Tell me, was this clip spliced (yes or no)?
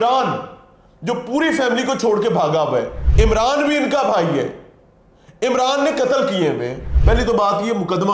yes